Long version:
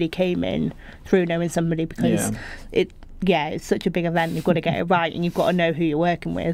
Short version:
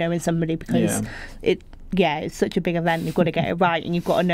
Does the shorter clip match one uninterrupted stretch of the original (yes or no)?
yes